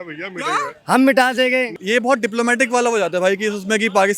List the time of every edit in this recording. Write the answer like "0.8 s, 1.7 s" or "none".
1.8 s